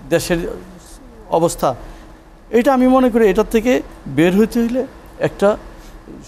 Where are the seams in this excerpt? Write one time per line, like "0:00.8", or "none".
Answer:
none